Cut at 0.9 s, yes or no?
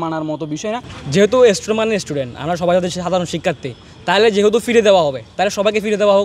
yes